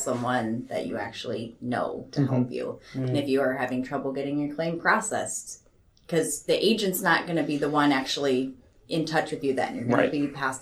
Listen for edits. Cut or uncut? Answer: uncut